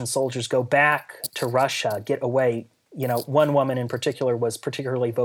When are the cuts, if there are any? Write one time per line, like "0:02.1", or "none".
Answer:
none